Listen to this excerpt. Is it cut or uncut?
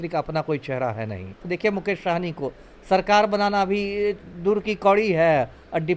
cut